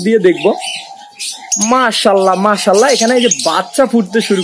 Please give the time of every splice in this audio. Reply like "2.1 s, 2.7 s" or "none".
none